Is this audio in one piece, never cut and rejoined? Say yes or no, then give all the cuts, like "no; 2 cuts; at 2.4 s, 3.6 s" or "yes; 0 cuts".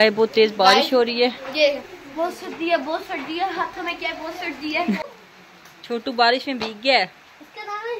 no; 1 cut; at 5.0 s